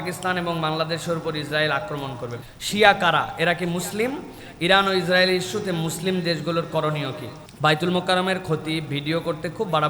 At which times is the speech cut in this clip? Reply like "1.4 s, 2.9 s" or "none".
2.4 s, 7.3 s